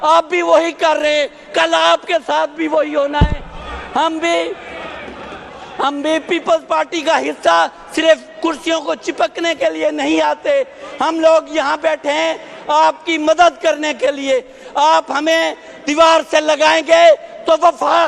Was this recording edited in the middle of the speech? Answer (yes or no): no